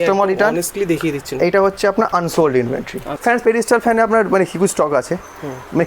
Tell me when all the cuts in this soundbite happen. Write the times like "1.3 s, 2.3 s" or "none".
3.1 s